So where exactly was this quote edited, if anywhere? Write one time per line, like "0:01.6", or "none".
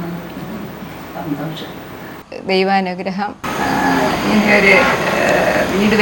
0:03.4